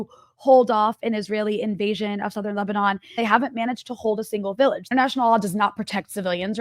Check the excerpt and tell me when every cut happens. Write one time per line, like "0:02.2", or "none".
0:03.2
0:04.8